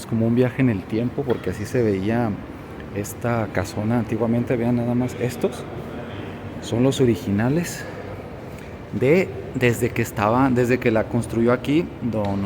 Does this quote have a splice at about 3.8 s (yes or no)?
no